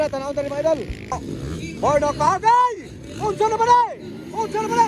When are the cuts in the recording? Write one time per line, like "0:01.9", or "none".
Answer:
0:01.2